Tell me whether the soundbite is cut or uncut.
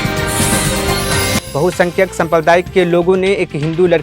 cut